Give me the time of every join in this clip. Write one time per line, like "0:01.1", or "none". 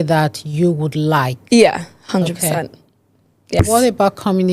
0:03.6